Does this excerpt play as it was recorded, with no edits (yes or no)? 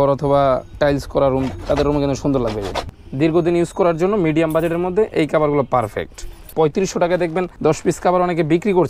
no